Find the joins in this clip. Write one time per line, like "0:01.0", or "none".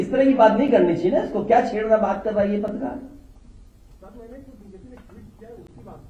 none